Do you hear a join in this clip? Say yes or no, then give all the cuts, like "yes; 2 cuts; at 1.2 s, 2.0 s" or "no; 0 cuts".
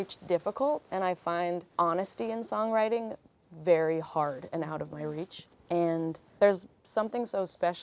yes; 1 cut; at 1.7 s